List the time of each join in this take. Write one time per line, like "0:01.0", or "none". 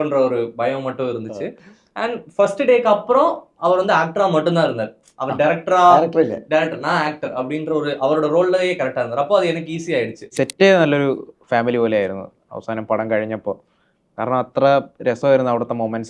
0:10.3